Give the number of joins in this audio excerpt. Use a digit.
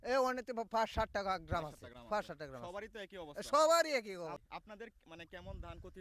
1